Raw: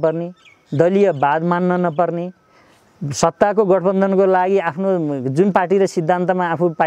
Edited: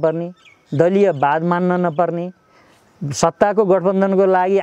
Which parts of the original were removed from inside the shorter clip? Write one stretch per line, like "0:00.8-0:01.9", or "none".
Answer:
none